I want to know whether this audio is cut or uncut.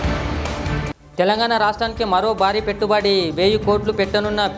cut